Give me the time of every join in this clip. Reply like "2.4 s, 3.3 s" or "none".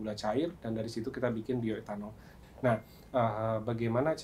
2.3 s